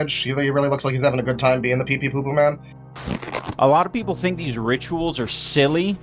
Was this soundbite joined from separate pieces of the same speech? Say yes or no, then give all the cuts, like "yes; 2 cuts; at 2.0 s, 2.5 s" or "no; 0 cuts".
yes; 1 cut; at 2.9 s